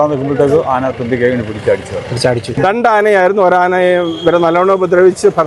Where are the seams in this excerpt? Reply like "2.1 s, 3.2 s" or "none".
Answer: 2.6 s